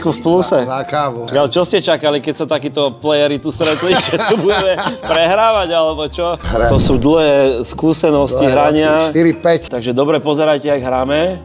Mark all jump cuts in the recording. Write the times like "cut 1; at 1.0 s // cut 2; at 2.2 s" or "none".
cut 1; at 1.2 s // cut 2; at 6.4 s // cut 3; at 9.7 s